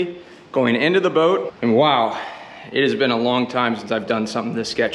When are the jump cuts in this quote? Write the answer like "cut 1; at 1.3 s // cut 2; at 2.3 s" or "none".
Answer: cut 1; at 1.5 s